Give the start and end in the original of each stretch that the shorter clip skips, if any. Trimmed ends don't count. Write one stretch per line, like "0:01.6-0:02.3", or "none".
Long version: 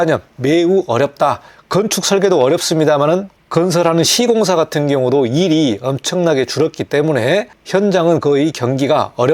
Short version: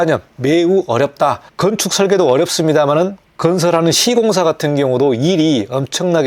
0:01.5-0:01.6